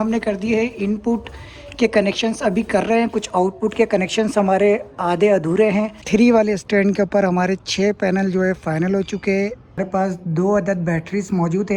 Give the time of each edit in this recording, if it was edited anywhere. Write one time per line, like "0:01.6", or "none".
0:06.0
0:09.8